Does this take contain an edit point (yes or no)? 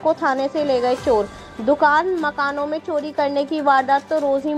no